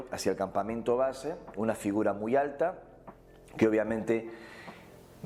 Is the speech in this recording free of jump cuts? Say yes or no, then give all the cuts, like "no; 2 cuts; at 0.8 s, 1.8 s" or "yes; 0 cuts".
yes; 0 cuts